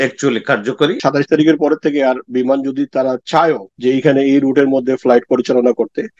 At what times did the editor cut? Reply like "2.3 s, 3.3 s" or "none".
1.0 s, 3.7 s

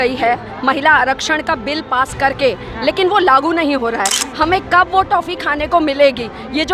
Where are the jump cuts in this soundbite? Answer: none

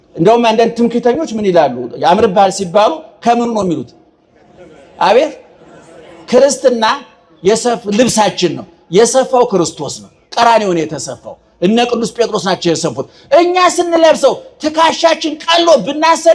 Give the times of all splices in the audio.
none

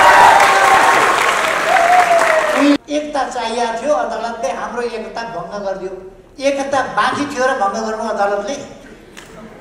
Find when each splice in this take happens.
2.8 s

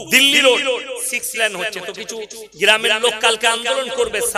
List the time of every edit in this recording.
none

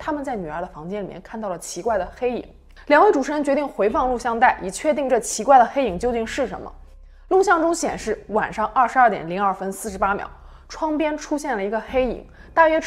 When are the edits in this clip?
none

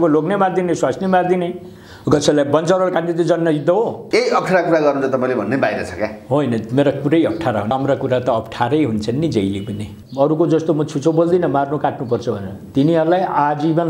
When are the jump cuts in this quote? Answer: 4.0 s, 7.7 s, 9.9 s

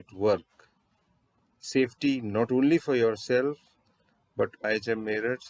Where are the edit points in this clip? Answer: 4.6 s

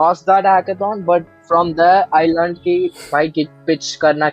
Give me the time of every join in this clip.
none

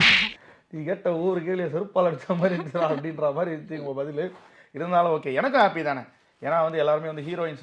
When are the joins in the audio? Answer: none

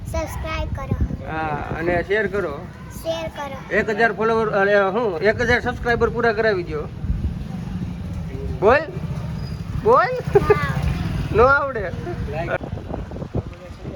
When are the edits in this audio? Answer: 12.6 s

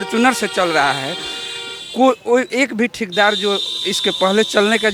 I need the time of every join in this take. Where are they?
none

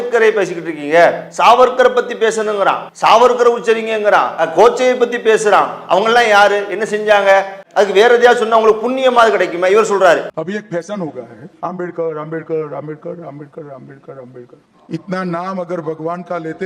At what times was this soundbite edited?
2.9 s, 7.6 s, 10.3 s

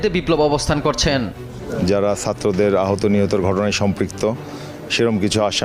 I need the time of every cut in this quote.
1.7 s

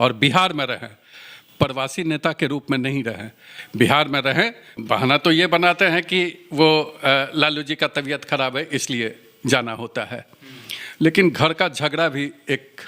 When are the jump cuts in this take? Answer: 4.7 s

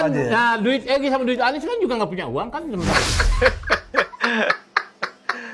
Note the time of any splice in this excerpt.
2.9 s

